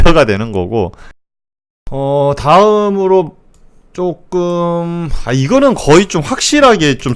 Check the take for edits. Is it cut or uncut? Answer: cut